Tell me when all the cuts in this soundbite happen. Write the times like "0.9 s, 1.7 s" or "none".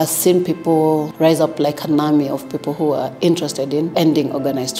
1.1 s, 3.9 s